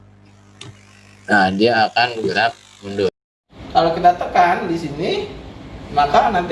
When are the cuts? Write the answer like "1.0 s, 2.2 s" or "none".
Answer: 3.4 s